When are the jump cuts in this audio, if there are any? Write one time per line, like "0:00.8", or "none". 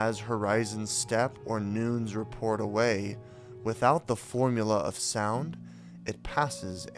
none